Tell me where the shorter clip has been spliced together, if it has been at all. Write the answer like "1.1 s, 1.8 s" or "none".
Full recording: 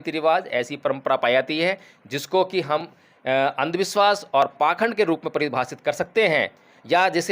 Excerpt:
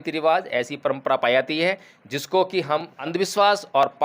3.0 s